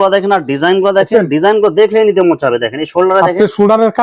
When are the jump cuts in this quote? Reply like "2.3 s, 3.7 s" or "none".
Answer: none